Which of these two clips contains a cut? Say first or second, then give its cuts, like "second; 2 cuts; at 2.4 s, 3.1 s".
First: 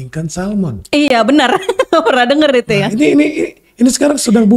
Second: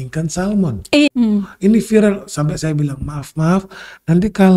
second; 1 cut; at 1.1 s